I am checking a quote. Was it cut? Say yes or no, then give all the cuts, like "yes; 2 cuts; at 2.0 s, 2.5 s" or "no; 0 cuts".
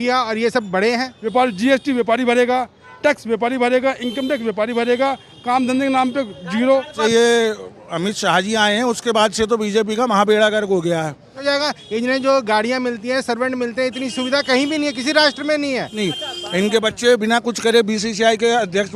yes; 4 cuts; at 1.2 s, 6.9 s, 11.3 s, 15.9 s